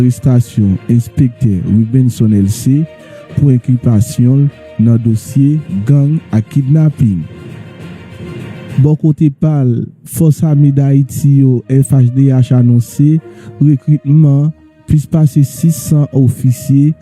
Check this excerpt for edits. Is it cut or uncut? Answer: cut